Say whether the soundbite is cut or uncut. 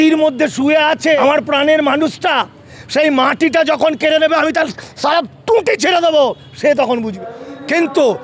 cut